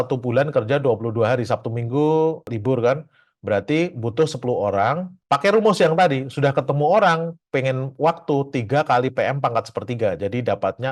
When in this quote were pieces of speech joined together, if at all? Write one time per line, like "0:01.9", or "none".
none